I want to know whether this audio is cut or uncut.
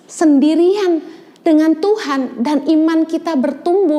uncut